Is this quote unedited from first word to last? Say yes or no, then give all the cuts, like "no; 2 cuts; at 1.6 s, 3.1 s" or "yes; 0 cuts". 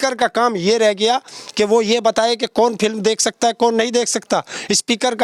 yes; 0 cuts